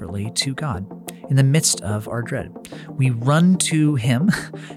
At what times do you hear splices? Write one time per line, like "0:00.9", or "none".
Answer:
none